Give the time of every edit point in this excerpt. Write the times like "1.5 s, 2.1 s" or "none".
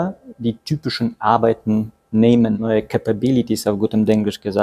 2.6 s